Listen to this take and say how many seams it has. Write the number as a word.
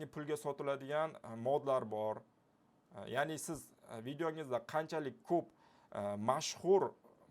zero